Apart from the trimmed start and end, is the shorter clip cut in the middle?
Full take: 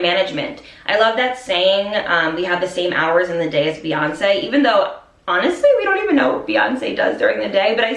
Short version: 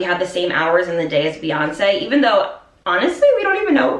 no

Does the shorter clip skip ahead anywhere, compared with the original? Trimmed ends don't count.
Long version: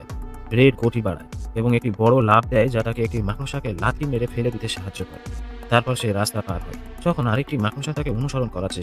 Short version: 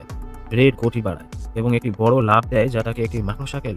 no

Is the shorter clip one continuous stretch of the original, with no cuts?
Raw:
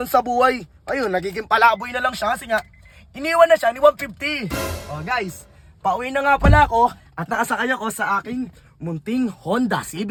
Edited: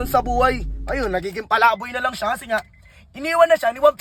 yes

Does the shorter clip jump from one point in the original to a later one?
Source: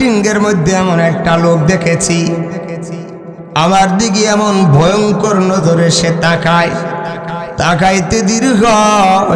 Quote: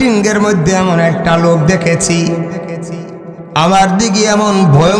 no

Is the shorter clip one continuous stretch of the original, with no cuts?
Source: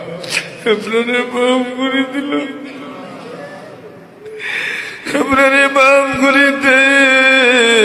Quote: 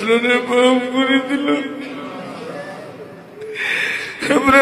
yes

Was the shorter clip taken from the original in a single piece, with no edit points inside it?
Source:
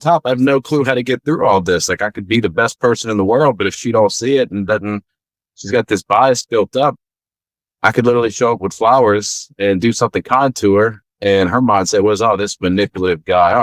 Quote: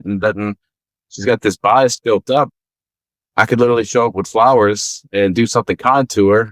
yes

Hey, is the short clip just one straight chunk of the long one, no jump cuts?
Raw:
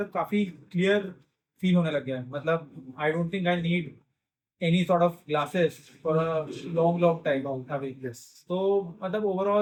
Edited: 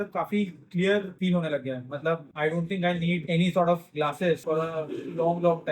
no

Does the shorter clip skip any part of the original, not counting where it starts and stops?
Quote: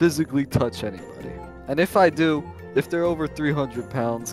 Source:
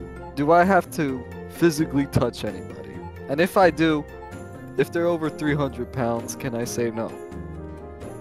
yes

